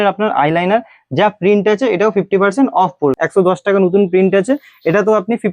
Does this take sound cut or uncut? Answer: cut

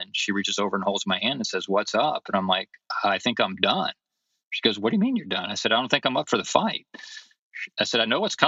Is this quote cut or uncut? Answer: uncut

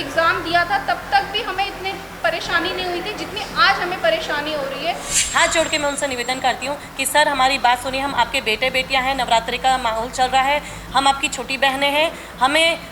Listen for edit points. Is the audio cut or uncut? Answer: cut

